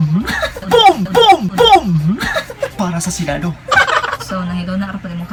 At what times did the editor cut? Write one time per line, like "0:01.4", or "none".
none